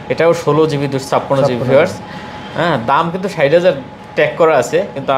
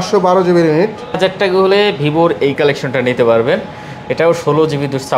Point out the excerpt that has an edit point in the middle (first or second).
second